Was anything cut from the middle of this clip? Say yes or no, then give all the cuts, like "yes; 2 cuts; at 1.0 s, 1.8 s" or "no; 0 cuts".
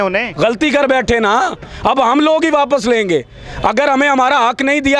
no; 0 cuts